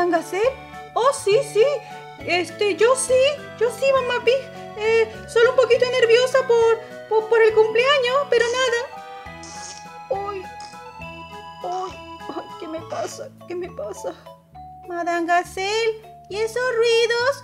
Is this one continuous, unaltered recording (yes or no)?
no